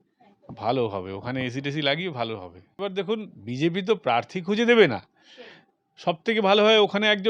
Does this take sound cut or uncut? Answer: cut